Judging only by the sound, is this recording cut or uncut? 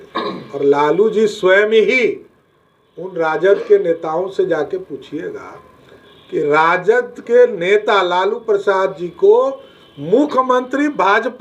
uncut